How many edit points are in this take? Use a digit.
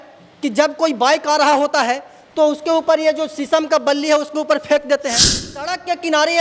1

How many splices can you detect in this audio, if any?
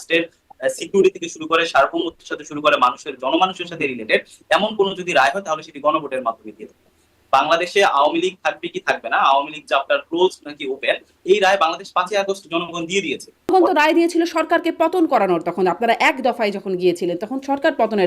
1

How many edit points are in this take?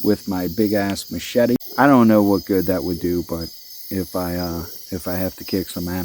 1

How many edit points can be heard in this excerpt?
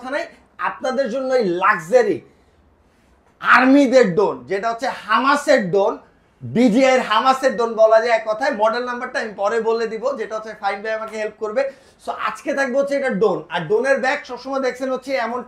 0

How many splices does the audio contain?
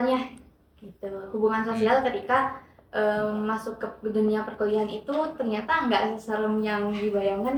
0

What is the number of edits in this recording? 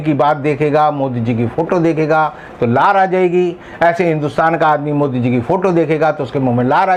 0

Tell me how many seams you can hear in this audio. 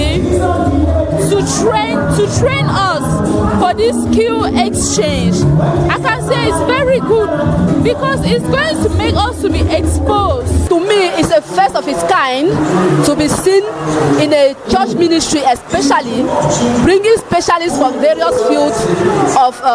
1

